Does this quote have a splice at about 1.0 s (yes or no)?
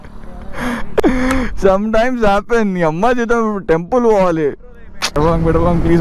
yes